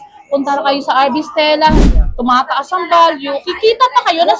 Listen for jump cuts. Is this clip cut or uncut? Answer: cut